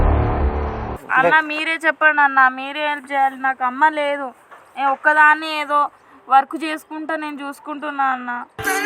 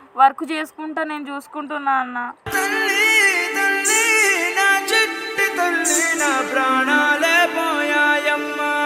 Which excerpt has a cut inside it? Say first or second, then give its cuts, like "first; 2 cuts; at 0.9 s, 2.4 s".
first; 1 cut; at 0.9 s